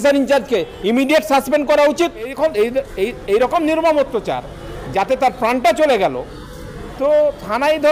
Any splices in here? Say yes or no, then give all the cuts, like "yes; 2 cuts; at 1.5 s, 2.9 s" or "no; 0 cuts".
yes; 1 cut; at 2.3 s